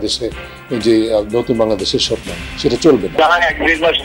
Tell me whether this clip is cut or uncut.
cut